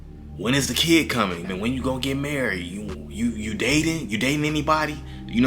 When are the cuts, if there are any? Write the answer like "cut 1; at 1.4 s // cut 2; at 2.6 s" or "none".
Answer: cut 1; at 1.4 s